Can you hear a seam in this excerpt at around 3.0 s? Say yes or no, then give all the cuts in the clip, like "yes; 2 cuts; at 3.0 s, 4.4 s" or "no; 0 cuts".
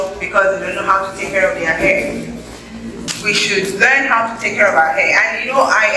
yes; 1 cut; at 3.0 s